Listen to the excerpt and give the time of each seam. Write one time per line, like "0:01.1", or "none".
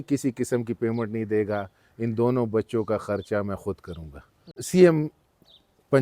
0:04.6

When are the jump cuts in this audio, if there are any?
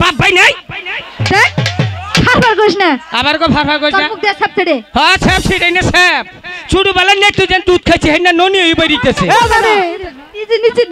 0:09.5

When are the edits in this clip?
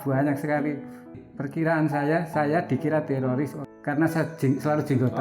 0:01.2
0:03.6

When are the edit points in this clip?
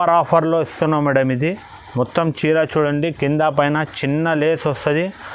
none

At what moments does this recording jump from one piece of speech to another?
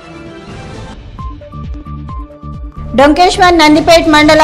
0:00.9

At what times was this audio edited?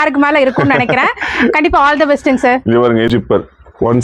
0:03.1

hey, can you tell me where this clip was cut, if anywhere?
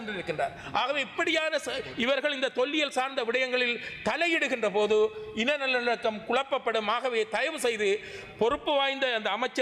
none

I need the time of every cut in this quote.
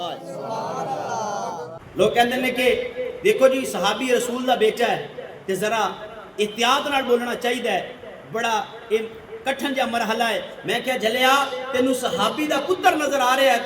0:01.8

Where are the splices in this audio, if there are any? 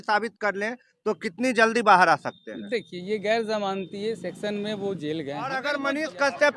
0:05.6

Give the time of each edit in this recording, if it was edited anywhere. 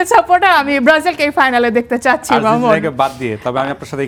none

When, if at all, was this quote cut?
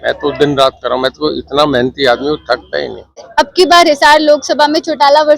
0:03.5

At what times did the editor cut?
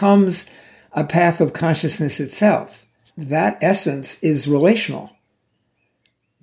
0:03.1

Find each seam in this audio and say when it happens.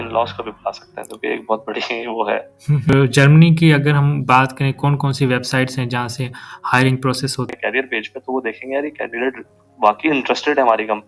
0:02.9
0:07.5

